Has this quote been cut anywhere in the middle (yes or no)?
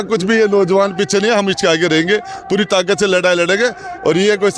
no